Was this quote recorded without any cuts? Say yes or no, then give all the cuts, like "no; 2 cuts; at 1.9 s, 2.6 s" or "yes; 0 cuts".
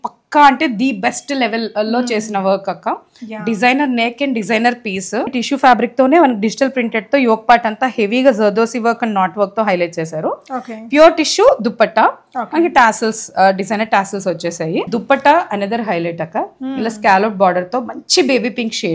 no; 2 cuts; at 5.4 s, 14.9 s